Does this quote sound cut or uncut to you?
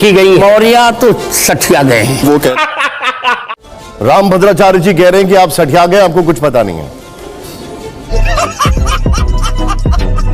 uncut